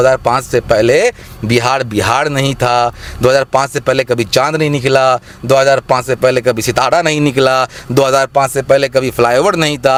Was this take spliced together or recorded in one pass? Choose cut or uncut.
uncut